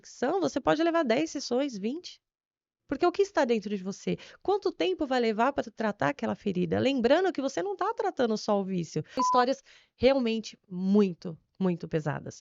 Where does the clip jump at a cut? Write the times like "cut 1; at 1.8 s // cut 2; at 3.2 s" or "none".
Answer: cut 1; at 9.2 s